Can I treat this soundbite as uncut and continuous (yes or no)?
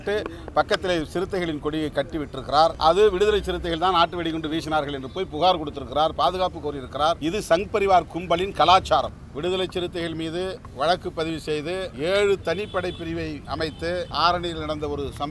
no